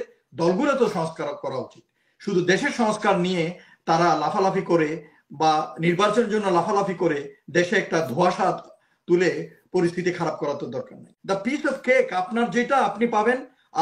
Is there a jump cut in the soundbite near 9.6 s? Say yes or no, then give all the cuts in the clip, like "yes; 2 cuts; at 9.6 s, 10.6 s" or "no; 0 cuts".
no; 1 cut; at 11.1 s